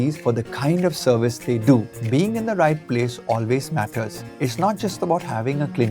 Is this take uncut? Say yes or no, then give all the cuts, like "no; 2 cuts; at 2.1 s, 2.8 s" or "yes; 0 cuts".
no; 1 cut; at 1.9 s